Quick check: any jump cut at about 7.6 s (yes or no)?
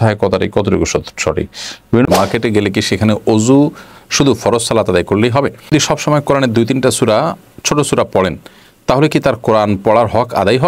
no